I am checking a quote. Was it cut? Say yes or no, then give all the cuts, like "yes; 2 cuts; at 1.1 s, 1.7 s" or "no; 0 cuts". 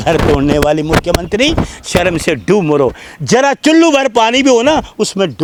no; 0 cuts